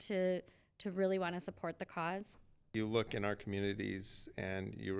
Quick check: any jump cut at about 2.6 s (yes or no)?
yes